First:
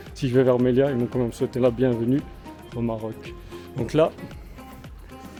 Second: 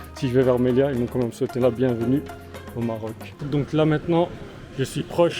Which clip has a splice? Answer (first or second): second